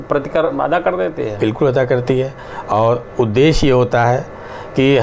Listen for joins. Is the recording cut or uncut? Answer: uncut